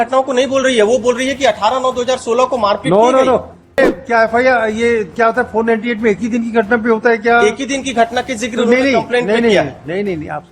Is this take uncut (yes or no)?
no